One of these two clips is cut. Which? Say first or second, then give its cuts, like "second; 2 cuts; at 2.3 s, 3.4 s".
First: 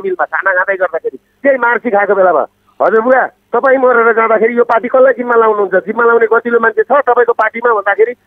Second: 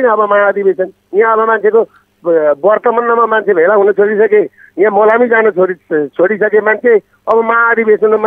first; 1 cut; at 3.4 s